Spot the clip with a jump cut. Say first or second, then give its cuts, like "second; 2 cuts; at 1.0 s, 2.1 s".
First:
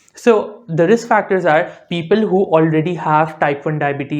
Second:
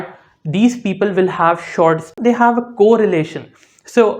second; 1 cut; at 2.1 s